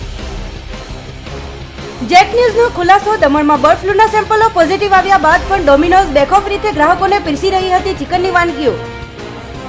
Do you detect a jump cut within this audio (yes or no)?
yes